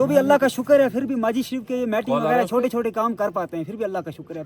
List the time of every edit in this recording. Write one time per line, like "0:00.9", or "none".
none

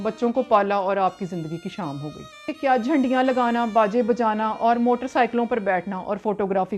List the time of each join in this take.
0:02.5

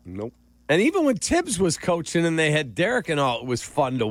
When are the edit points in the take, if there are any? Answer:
none

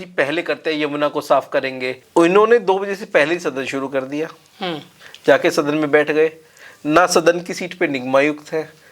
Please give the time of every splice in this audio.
0:02.0

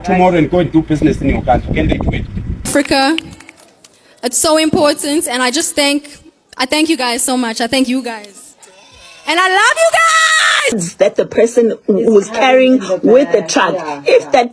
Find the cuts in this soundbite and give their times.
0:02.7
0:10.8

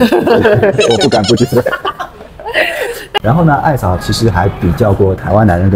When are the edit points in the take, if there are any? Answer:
0:03.2

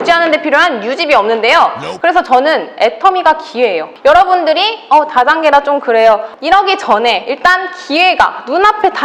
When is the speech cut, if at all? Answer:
0:01.9
0:03.9
0:06.3

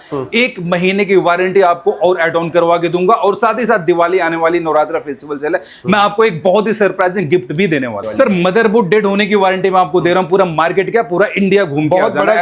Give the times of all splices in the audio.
0:08.0

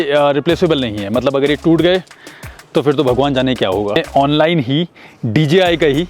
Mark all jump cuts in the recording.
0:04.0

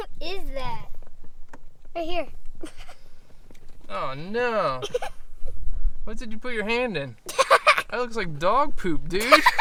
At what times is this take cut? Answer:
none

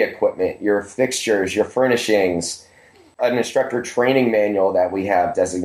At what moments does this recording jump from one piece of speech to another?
0:03.2

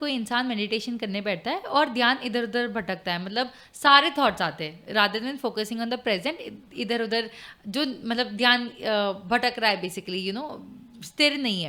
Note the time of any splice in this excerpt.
none

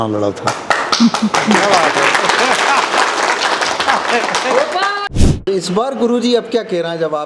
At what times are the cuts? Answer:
0:05.1

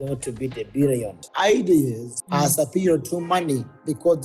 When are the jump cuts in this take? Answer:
0:01.2

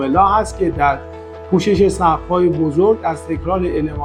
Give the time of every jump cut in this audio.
none

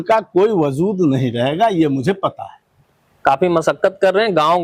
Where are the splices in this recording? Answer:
none

